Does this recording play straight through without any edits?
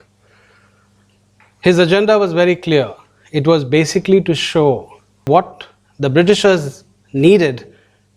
no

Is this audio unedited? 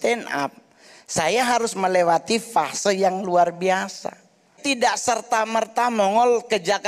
no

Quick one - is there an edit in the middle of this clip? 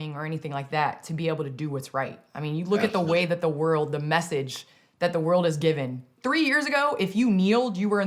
yes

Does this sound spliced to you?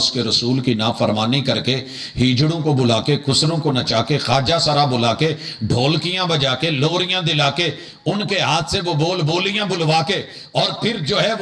no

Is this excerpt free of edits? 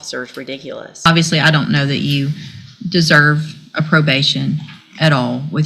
no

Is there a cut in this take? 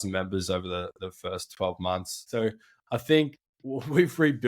yes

